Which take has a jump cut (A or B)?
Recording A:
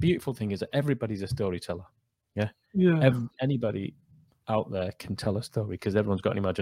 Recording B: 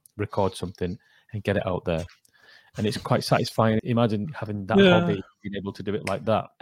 B